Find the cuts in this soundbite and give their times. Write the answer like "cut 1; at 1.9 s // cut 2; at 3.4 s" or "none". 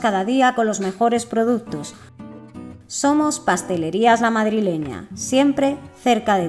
none